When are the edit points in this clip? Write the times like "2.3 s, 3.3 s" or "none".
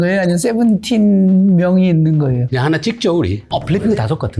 2.5 s, 3.4 s